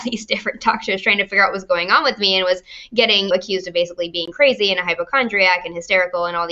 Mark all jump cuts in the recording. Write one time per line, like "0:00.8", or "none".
none